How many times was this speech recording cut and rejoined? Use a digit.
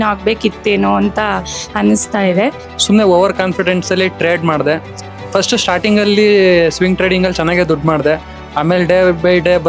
1